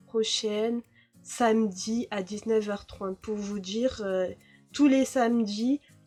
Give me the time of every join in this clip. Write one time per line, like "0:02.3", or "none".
none